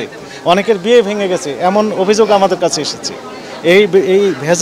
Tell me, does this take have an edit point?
no; 0 cuts

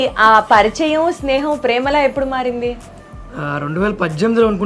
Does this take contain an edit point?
no; 0 cuts

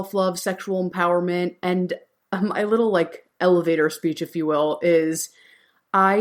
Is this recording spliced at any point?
no; 0 cuts

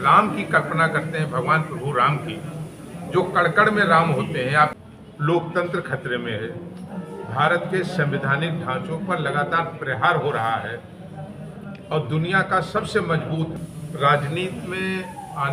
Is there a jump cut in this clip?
yes; 2 cuts; at 4.7 s, 13.5 s

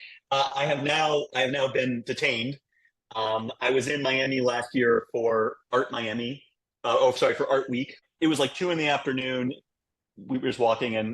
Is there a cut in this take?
yes; 1 cut; at 8.0 s

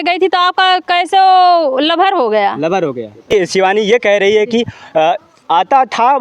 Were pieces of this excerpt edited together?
yes; 1 cut; at 3.3 s

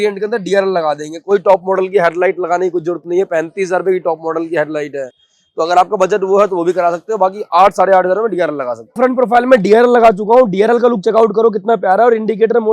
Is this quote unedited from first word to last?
no; 1 cut; at 9.0 s

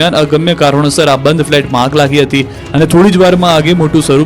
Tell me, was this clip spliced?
yes; 1 cut; at 1.5 s

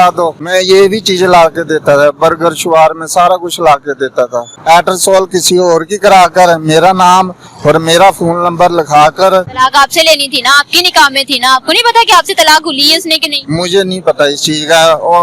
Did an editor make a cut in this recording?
yes; 2 cuts; at 4.5 s, 9.5 s

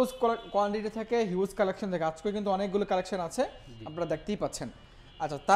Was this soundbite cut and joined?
no; 0 cuts

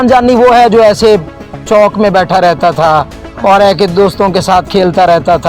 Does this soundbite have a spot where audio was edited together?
no; 0 cuts

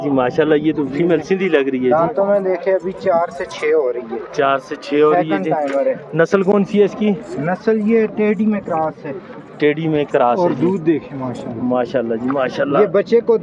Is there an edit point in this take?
no; 0 cuts

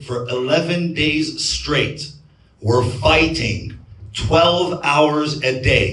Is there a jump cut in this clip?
no; 0 cuts

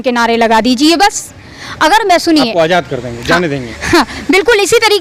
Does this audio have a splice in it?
no; 0 cuts

